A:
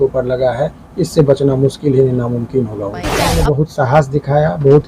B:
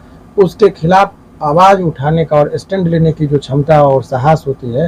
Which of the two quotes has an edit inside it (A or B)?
A